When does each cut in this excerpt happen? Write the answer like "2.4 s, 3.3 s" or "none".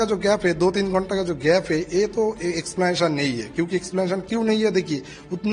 none